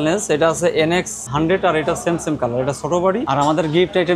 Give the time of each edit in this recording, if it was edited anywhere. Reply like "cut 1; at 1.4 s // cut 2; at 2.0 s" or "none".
cut 1; at 1.2 s // cut 2; at 3.2 s